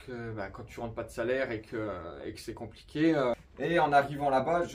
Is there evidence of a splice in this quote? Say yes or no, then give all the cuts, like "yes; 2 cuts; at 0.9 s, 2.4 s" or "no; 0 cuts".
yes; 1 cut; at 3.4 s